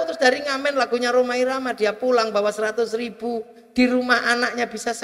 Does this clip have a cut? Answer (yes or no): no